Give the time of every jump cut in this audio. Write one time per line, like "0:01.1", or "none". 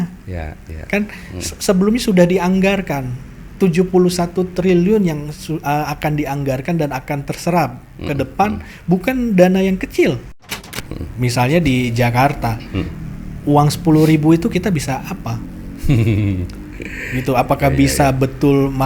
0:10.5